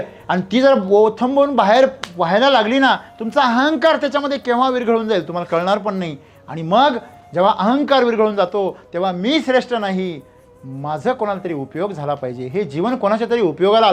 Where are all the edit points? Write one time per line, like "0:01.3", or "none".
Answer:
none